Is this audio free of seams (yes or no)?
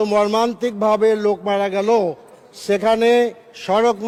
yes